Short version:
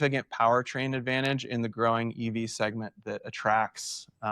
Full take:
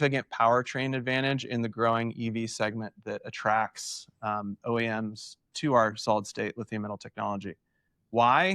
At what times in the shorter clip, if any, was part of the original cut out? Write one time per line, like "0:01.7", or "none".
none